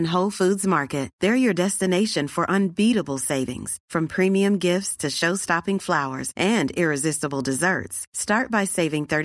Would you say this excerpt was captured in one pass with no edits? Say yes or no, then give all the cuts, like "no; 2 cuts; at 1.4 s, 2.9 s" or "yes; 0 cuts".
yes; 0 cuts